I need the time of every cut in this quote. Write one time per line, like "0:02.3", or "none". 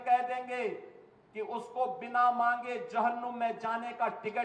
none